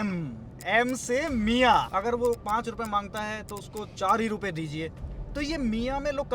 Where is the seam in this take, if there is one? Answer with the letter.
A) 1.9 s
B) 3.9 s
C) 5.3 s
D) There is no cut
A